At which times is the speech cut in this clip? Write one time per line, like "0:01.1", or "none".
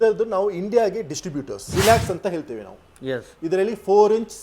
0:01.7

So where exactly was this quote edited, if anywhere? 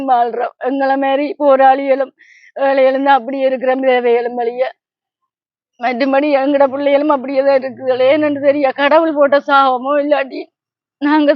none

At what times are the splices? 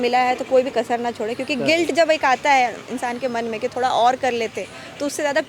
none

